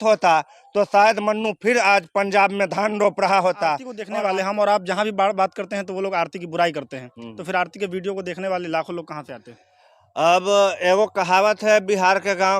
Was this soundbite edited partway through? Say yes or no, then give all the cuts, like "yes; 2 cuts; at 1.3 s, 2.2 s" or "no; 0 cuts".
yes; 1 cut; at 3.9 s